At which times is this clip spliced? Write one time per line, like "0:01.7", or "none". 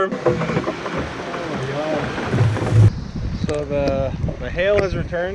0:02.9